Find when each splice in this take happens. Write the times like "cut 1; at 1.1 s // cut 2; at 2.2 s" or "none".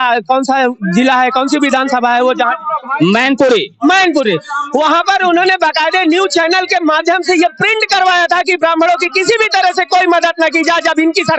none